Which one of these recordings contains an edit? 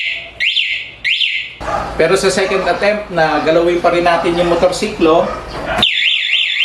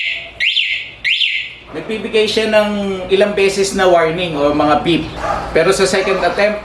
first; 1 cut; at 1.6 s

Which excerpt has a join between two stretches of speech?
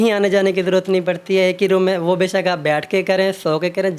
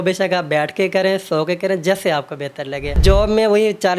second; 1 cut; at 3.0 s

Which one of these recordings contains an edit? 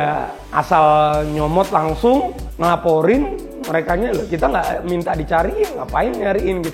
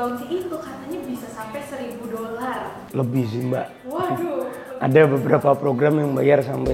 second; 1 cut; at 2.8 s

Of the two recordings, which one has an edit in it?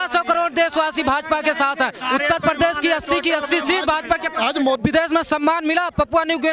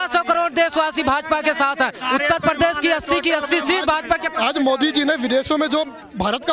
first; 1 cut; at 4.8 s

